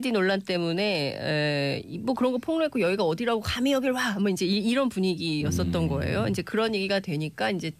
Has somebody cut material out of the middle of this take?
no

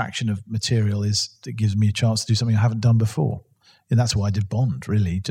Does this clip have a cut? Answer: yes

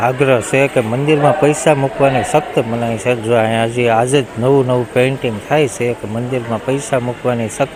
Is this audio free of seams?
yes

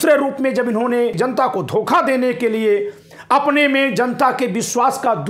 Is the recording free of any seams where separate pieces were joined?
no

